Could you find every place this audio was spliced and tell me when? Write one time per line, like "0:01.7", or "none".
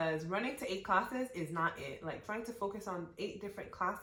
none